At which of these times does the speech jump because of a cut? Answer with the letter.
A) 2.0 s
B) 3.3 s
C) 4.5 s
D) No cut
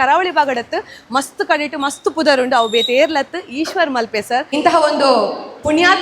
C